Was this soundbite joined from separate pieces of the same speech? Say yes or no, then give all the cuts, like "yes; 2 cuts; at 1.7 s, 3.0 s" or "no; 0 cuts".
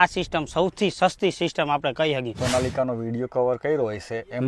yes; 1 cut; at 2.4 s